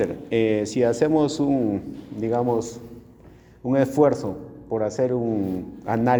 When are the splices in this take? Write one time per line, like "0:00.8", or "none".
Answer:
none